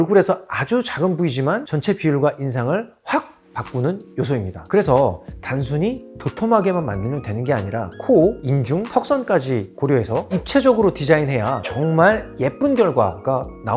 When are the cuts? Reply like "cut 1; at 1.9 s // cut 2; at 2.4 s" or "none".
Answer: none